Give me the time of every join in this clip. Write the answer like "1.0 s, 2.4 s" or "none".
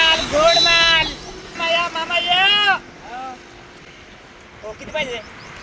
none